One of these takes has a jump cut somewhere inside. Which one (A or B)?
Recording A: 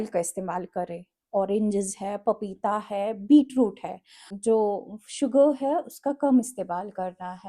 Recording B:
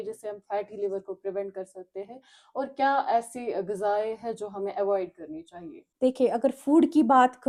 A